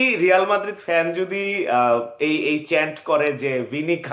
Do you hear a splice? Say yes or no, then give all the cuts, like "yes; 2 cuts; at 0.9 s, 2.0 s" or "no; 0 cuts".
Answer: no; 0 cuts